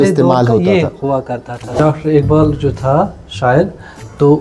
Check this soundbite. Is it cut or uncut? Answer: cut